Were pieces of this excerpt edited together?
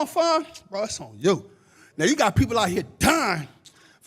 yes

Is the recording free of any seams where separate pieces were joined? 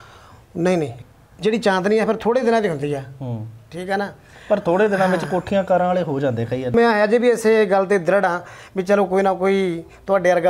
no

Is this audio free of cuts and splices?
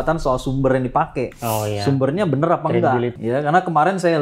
no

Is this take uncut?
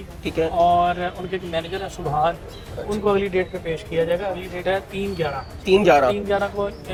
yes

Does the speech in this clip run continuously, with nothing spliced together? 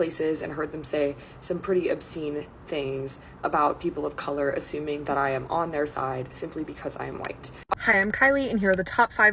no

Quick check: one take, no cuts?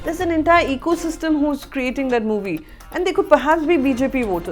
yes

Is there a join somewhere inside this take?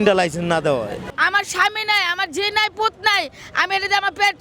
no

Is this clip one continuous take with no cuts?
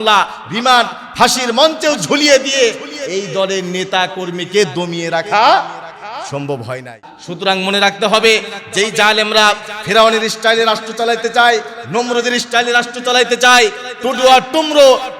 no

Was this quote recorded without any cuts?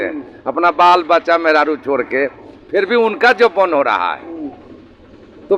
yes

